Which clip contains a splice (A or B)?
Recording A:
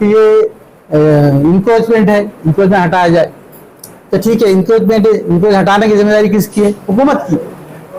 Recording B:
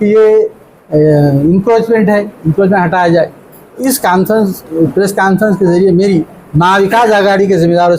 B